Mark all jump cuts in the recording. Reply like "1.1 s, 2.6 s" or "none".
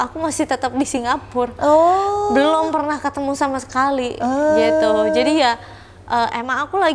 none

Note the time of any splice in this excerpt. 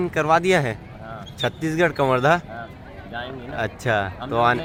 none

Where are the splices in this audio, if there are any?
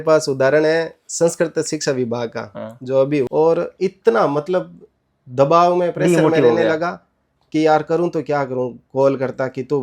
3.3 s

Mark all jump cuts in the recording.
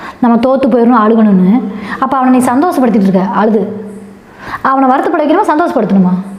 none

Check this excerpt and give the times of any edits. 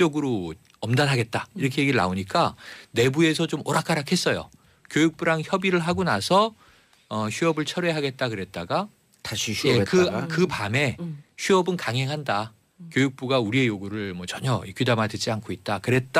12.8 s

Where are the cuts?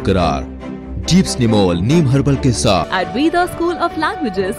2.9 s

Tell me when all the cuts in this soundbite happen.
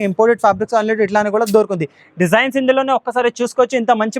none

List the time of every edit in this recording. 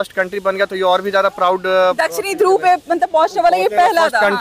none

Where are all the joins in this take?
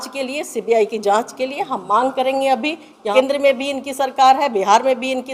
3.1 s

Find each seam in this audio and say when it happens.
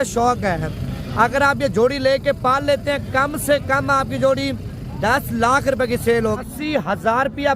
6.4 s

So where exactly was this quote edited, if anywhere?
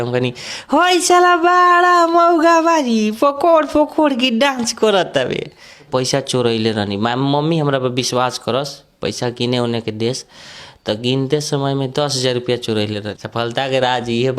5.9 s, 13.0 s

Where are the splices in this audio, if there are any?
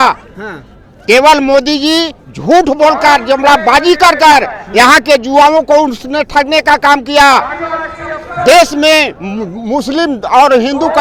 none

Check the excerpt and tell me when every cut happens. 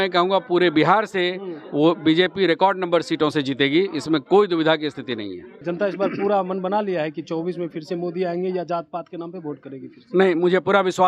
5.6 s

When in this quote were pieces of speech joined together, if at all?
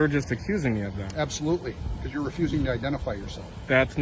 none

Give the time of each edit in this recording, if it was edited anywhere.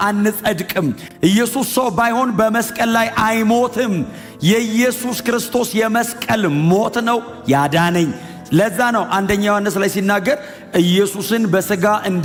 none

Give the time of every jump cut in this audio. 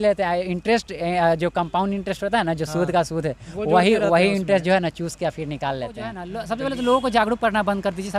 6.3 s

